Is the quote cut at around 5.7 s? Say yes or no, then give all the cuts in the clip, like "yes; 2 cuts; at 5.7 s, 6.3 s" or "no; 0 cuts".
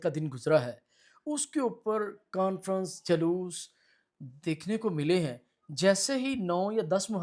no; 0 cuts